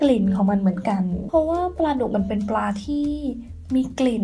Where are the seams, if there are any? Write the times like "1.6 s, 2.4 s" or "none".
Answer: 1.2 s